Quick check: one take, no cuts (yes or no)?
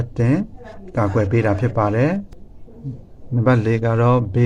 no